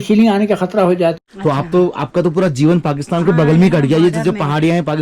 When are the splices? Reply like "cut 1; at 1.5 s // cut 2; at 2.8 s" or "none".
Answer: cut 1; at 1.2 s